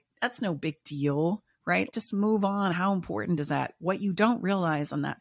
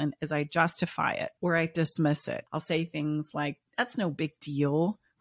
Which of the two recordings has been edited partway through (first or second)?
second